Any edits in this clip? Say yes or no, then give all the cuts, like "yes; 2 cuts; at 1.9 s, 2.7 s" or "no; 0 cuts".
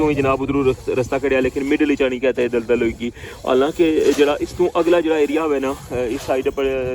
no; 0 cuts